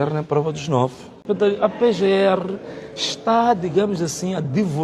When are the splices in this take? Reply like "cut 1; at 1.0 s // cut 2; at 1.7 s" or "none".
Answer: cut 1; at 1.2 s